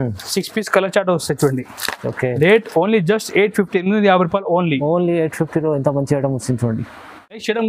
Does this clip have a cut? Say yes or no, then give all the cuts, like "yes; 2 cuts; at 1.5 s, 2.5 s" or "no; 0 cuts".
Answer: no; 0 cuts